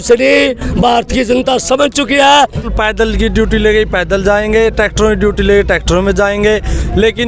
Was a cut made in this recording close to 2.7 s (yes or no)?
yes